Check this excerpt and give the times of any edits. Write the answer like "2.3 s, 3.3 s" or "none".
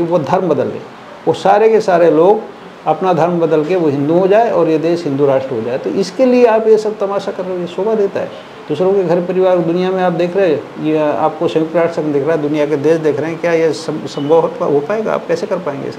none